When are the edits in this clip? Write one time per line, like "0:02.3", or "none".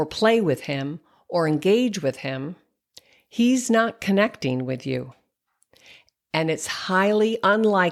none